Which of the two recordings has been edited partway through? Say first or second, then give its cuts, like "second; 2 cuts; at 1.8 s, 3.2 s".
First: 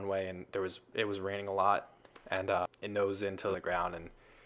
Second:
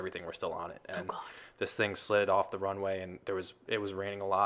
first; 1 cut; at 3.5 s